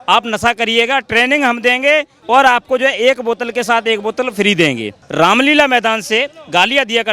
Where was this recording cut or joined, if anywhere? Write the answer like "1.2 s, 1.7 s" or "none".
2.1 s, 5.0 s